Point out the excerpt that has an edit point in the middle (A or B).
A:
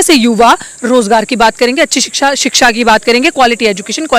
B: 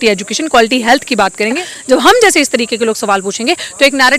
B